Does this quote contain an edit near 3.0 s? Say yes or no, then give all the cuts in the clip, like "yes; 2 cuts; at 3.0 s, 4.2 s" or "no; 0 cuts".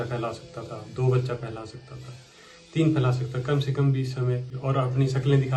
no; 1 cut; at 4.5 s